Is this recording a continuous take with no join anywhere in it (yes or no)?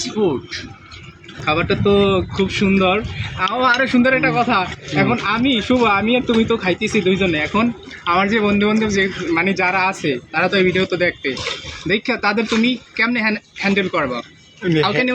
no